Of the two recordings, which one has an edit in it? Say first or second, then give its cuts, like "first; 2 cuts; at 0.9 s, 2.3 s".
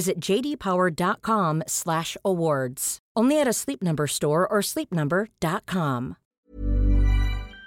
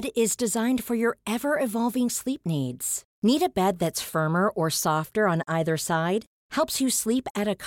first; 1 cut; at 6.3 s